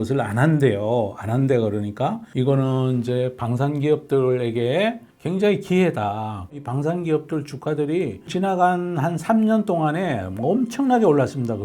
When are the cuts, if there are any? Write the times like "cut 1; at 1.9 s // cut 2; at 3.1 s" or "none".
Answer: cut 1; at 2.2 s // cut 2; at 6.6 s // cut 3; at 8.3 s